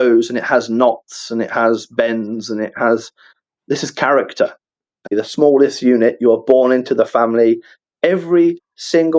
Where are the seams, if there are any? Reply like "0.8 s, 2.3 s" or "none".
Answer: 5.1 s